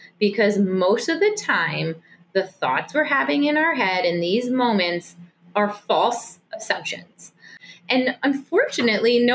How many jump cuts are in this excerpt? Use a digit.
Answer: 1